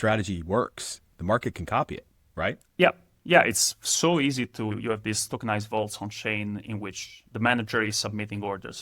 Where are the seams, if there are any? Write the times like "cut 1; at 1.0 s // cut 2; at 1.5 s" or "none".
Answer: cut 1; at 4.7 s